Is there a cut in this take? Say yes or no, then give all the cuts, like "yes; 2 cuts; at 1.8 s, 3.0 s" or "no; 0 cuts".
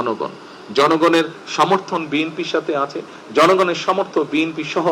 no; 0 cuts